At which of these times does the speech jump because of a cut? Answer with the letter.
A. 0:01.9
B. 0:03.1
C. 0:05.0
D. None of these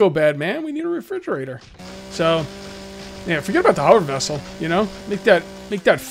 C